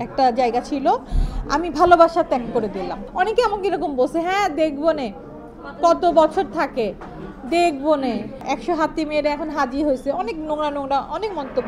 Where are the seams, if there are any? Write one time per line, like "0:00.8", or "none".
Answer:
0:03.0
0:08.5